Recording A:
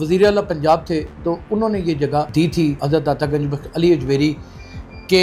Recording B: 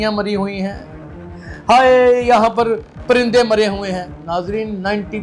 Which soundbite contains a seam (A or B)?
A